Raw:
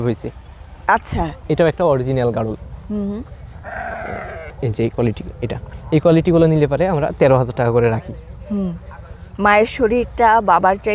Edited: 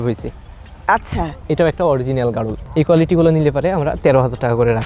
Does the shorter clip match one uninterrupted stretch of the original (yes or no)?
no